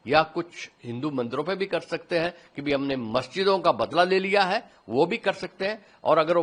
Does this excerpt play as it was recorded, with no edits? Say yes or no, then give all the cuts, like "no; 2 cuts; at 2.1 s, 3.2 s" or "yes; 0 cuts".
yes; 0 cuts